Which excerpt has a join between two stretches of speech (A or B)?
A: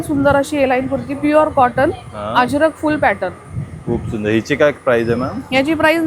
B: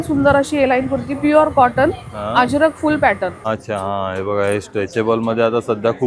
B